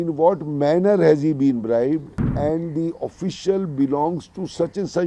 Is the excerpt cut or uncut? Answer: cut